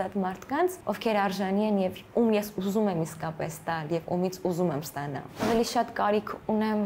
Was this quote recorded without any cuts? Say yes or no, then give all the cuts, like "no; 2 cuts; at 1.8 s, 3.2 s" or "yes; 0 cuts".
no; 2 cuts; at 0.8 s, 5.4 s